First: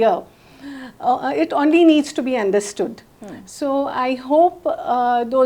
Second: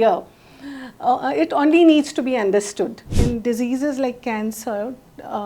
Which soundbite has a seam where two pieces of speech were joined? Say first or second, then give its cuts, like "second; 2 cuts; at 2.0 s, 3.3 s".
second; 1 cut; at 3.1 s